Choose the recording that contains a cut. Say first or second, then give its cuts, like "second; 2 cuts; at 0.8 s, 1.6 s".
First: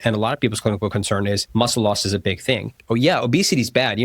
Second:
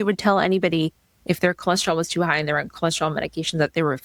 first; 2 cuts; at 1.4 s, 2.7 s